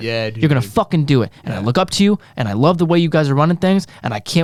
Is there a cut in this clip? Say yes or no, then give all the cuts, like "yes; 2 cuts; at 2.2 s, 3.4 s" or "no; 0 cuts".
no; 0 cuts